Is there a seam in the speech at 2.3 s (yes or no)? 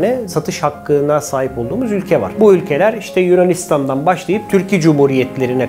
yes